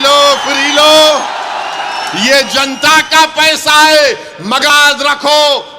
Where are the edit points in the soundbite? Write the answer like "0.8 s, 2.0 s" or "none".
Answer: 4.7 s